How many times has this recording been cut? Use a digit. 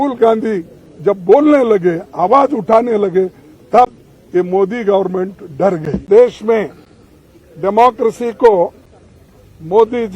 1